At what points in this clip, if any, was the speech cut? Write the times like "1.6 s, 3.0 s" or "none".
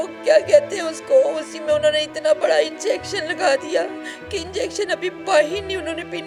none